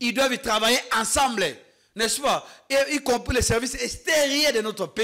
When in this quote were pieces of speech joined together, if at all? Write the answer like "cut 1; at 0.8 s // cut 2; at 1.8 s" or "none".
none